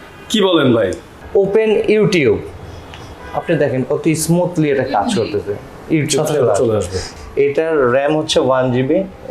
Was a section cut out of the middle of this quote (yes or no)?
yes